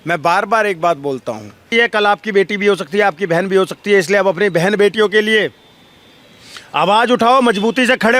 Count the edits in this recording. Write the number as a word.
one